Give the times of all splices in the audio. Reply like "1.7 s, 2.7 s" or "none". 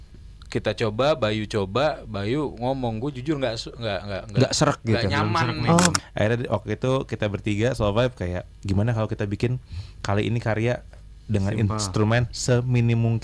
5.9 s